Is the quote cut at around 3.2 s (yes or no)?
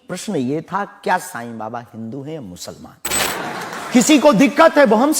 yes